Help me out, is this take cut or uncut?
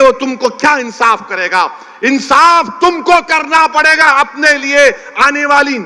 uncut